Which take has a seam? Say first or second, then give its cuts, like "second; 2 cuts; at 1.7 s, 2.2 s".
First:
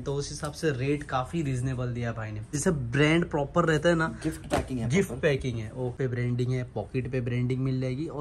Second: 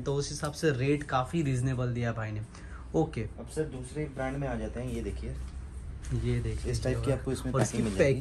first; 2 cuts; at 2.6 s, 6.0 s